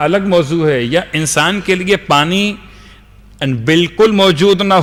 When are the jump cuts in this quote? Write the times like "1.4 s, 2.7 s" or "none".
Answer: none